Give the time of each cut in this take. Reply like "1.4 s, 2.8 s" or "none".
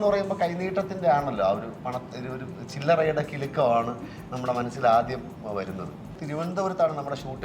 6.2 s